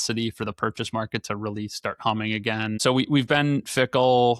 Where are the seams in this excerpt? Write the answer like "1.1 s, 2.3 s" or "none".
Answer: 2.8 s

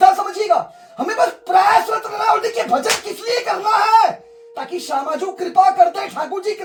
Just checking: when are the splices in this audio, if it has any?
none

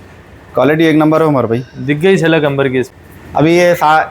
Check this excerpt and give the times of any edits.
2.9 s

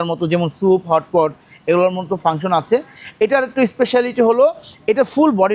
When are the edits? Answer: none

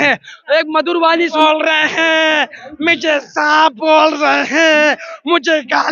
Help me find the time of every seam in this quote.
1.3 s

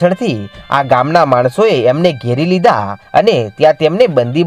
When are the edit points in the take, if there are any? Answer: 2.9 s

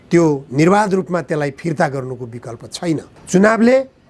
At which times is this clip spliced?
3.1 s

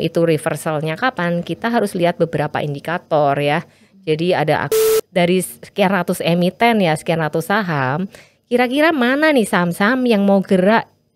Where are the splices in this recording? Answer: 4.9 s

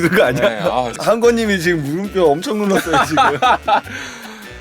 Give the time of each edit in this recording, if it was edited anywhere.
0.9 s

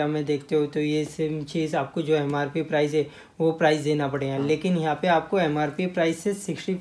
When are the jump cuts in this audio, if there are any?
none

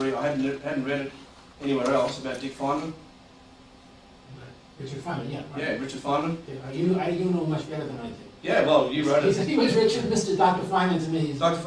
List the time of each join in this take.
10.4 s

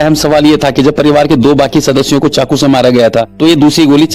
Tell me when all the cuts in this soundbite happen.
none

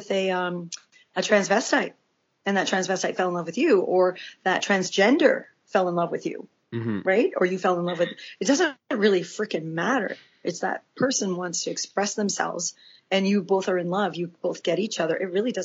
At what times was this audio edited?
4.6 s

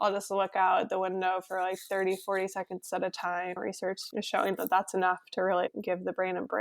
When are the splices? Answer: 3.6 s, 5.7 s

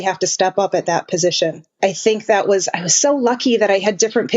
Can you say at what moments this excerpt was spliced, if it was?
1.7 s

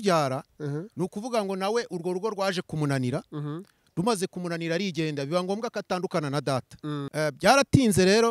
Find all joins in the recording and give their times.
7.1 s

